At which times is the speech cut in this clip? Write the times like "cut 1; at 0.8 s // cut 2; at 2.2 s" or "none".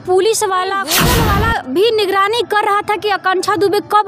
cut 1; at 1.1 s